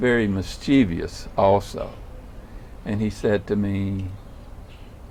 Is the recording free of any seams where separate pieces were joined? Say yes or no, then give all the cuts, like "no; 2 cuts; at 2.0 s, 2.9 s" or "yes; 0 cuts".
yes; 0 cuts